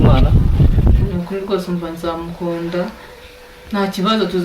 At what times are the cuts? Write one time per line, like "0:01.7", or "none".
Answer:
0:01.1